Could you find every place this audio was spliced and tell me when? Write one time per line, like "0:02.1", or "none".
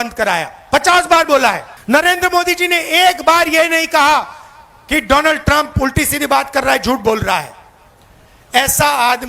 0:01.7